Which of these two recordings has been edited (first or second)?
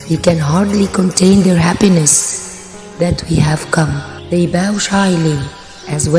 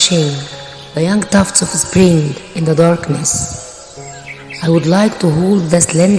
first